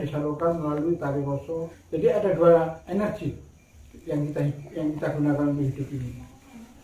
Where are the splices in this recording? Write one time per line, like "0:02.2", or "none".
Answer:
0:01.8
0:02.8

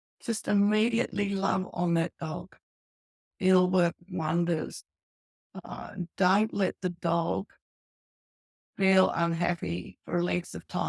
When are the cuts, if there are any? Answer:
0:03.2

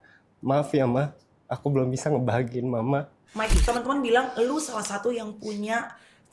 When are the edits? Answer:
0:03.6

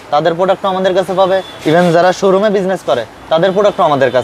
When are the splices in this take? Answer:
none

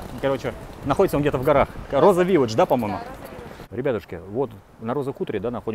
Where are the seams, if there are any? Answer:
0:03.4

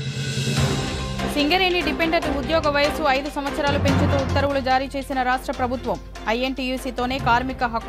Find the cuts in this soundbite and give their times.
0:01.3

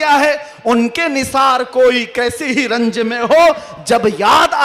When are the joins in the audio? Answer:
none

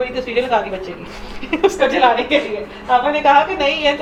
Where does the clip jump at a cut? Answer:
none

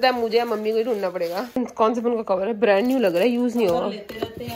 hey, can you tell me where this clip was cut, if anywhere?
0:01.6

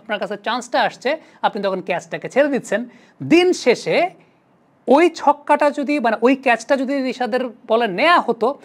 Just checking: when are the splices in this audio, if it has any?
none

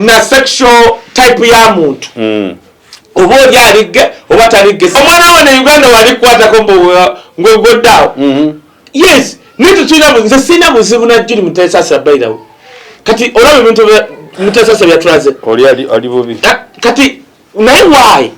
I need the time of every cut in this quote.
0:04.9

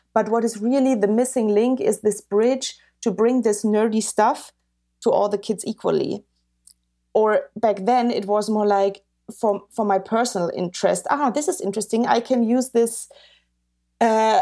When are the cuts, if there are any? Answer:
none

